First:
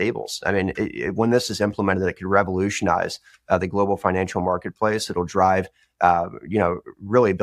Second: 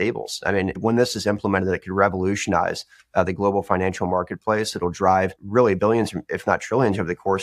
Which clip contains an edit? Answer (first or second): second